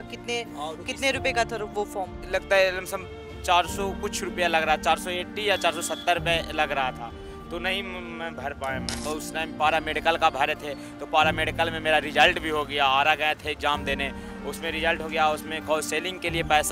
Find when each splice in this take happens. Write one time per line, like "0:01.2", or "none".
0:09.0